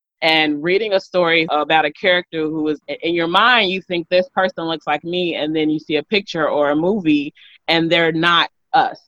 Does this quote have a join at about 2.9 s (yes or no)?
yes